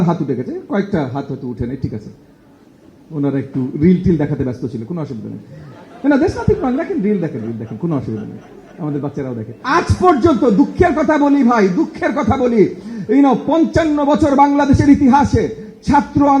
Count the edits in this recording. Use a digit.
1